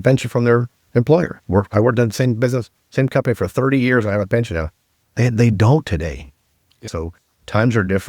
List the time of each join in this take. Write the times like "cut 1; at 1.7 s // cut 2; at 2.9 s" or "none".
cut 1; at 6.8 s